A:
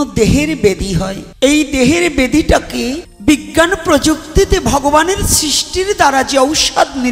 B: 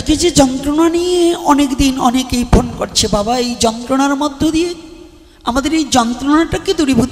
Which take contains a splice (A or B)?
A